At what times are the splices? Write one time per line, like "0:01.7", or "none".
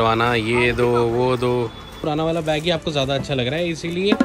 0:02.0